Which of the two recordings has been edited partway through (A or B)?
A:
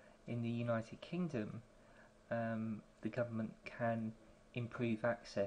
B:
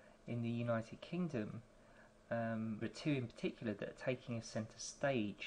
A